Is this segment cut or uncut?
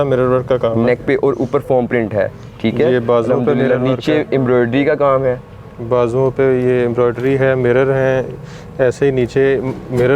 uncut